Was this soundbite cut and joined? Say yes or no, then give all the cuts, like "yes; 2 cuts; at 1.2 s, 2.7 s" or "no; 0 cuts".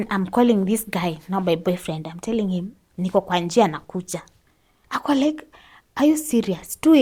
no; 0 cuts